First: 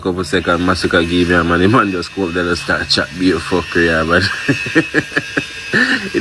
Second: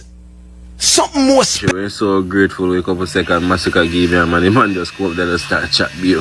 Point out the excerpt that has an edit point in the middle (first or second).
second